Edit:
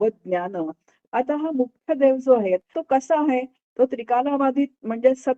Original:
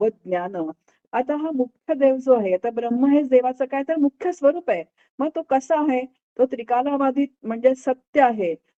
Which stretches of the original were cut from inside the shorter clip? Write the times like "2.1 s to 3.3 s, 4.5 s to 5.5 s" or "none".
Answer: 2.7 s to 5.3 s